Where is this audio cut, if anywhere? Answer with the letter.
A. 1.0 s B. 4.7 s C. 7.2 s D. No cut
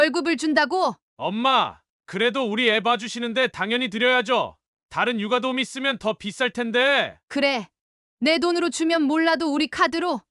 A